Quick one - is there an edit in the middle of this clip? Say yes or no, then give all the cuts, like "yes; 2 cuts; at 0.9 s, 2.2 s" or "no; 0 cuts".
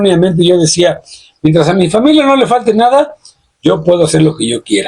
no; 0 cuts